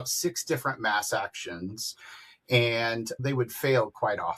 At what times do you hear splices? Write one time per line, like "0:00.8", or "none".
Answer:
none